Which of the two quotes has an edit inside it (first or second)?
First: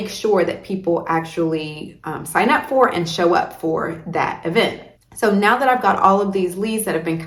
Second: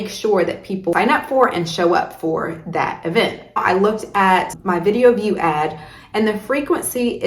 second